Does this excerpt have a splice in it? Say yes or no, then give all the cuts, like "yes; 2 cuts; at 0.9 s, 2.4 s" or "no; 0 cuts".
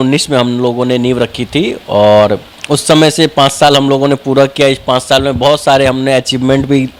no; 0 cuts